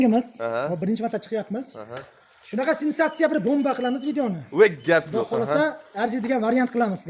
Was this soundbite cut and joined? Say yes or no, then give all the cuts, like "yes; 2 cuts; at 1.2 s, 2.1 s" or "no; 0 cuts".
no; 0 cuts